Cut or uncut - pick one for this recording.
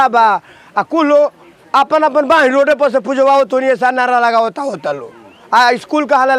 uncut